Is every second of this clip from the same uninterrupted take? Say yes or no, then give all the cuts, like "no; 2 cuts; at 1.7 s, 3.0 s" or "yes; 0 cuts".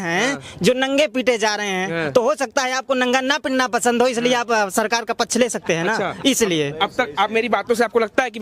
yes; 0 cuts